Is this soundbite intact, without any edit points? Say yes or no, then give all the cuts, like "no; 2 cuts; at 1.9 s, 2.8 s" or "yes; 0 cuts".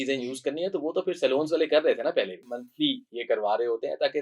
no; 1 cut; at 2.4 s